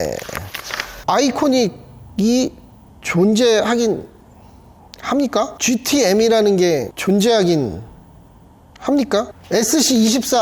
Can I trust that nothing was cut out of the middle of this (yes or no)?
no